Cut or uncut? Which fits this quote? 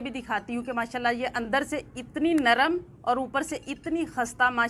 uncut